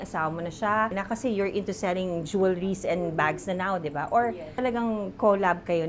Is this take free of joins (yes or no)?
no